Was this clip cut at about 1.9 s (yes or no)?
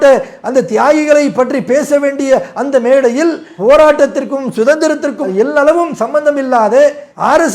no